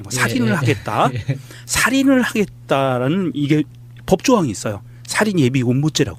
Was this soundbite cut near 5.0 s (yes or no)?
no